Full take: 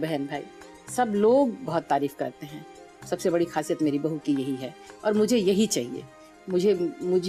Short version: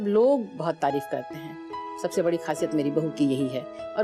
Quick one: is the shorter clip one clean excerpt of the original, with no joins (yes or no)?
yes